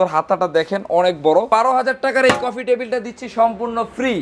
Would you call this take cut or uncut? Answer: cut